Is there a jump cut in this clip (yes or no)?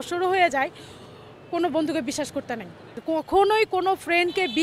yes